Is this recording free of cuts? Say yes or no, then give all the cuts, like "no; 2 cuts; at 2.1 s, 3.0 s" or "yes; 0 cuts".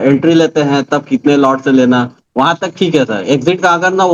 yes; 0 cuts